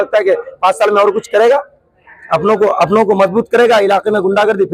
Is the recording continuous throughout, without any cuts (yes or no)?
yes